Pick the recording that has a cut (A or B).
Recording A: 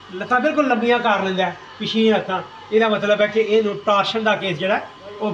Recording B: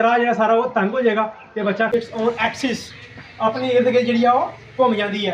B